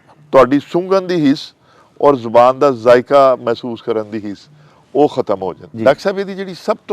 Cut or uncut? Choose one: cut